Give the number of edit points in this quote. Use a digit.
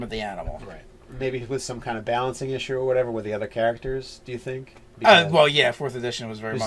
1